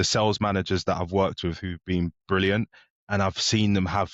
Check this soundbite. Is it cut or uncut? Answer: uncut